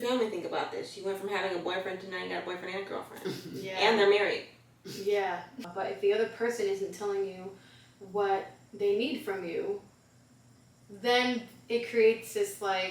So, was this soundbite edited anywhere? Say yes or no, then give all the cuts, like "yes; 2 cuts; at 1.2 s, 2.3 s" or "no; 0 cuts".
yes; 1 cut; at 5.6 s